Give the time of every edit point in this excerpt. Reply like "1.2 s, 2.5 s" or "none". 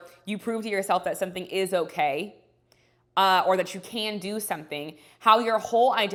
none